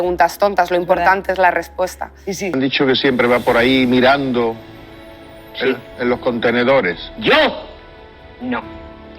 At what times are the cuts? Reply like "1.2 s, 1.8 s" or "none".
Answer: 2.5 s